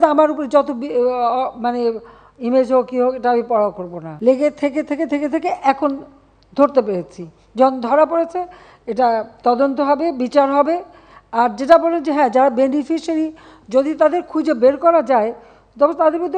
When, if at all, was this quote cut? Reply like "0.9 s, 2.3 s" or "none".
4.0 s